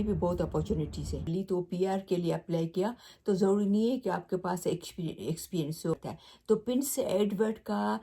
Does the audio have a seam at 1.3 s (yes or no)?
yes